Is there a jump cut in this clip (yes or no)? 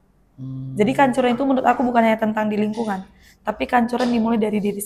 no